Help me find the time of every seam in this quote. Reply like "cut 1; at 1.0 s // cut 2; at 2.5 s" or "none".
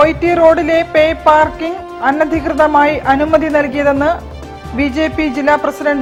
none